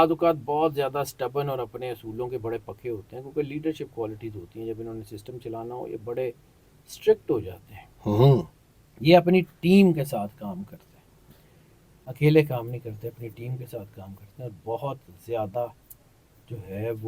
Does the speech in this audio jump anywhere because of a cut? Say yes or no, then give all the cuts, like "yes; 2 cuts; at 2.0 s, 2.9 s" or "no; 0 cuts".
no; 0 cuts